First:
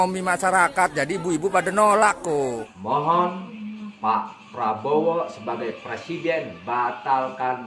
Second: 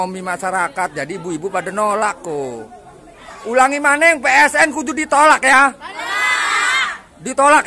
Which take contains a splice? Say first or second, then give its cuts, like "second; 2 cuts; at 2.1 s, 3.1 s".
first; 1 cut; at 2.7 s